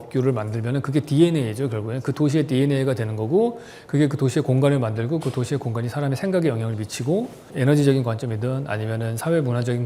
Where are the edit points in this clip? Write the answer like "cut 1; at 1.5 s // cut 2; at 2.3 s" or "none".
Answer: cut 1; at 7.5 s